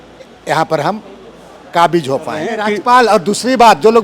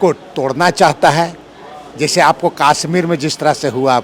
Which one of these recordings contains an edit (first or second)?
first